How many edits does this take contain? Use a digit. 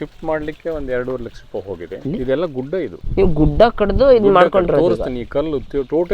2